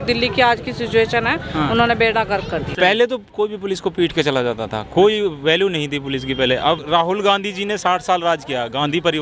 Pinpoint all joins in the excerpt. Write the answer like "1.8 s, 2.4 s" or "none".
2.7 s, 6.8 s